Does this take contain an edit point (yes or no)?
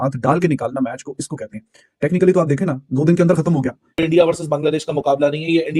yes